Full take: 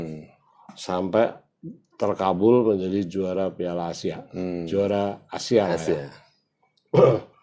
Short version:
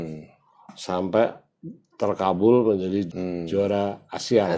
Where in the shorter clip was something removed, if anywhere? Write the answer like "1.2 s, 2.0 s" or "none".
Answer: 3.1 s